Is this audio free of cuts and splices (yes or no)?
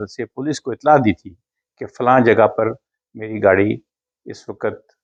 yes